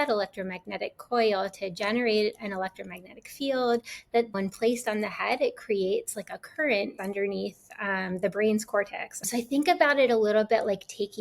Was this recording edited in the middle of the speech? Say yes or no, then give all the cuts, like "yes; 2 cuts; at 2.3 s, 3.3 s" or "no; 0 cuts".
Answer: yes; 3 cuts; at 4.3 s, 6.9 s, 9.3 s